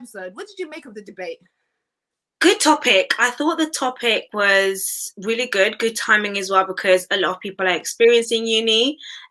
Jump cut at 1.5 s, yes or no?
no